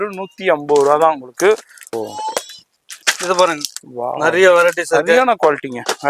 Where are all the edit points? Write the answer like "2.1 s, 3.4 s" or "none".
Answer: 1.8 s